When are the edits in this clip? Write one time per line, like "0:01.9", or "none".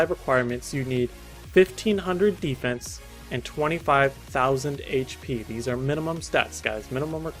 0:04.2